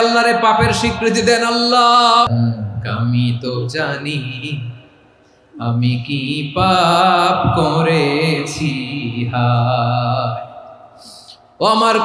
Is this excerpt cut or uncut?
cut